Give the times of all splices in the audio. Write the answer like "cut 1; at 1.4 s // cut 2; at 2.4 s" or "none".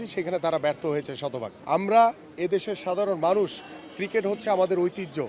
cut 1; at 1.5 s